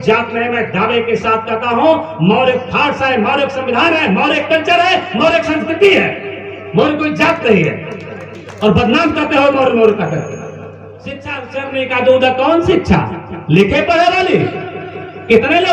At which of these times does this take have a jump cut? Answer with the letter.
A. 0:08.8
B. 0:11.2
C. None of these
B